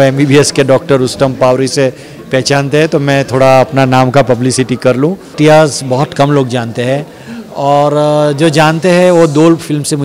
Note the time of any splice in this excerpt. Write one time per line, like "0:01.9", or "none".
0:05.3